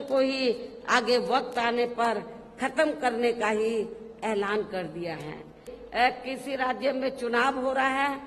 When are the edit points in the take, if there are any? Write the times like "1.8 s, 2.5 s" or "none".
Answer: 5.8 s